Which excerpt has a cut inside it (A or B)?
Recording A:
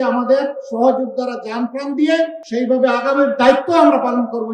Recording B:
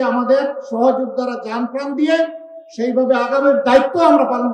A